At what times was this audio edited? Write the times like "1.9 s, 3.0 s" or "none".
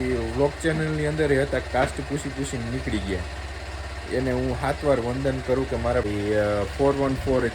6.1 s

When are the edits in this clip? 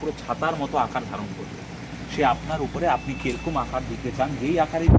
none

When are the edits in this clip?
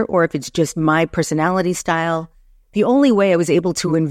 none

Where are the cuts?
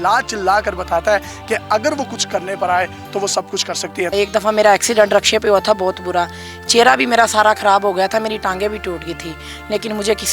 4.1 s

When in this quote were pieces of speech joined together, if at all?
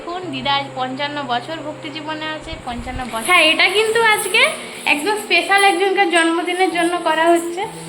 3.2 s

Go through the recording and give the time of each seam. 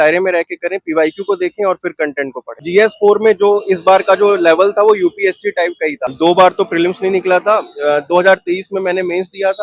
2.6 s, 6.1 s

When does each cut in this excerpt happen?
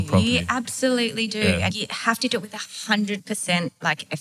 1.7 s, 3.2 s

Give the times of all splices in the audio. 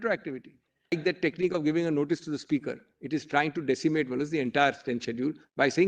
0.9 s

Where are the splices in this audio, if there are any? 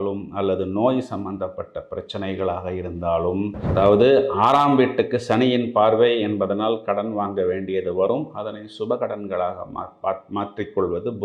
3.6 s

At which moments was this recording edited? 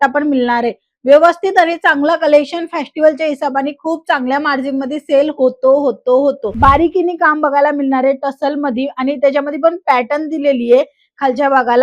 6.5 s

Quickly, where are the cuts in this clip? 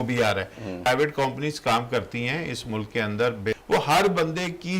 0.8 s, 3.5 s

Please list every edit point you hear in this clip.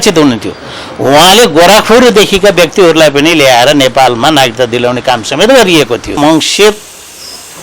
6.2 s

